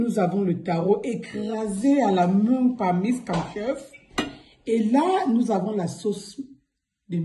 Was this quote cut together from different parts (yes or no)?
no